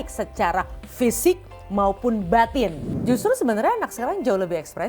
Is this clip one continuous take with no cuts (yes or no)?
no